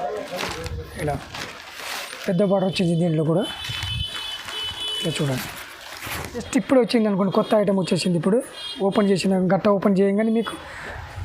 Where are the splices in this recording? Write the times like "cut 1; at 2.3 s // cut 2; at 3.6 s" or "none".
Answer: cut 1; at 6.5 s